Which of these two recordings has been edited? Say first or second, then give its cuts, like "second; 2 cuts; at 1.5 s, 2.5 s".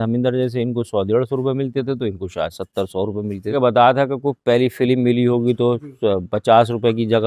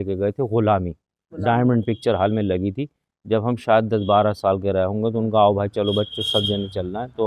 first; 1 cut; at 3.5 s